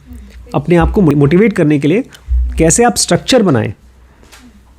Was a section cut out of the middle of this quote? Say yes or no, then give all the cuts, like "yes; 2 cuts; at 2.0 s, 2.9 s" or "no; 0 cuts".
yes; 1 cut; at 1.1 s